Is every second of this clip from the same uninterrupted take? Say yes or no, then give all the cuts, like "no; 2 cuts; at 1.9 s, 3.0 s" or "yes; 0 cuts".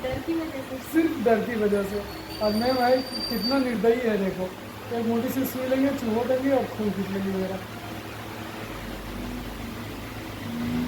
yes; 0 cuts